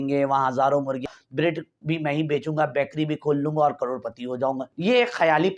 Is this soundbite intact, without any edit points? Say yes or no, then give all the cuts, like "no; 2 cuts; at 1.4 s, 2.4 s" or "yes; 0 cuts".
no; 2 cuts; at 1.0 s, 4.7 s